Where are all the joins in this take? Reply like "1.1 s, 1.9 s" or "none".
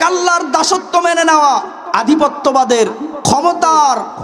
1.8 s